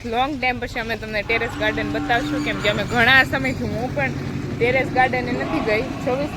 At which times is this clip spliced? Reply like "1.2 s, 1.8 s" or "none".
none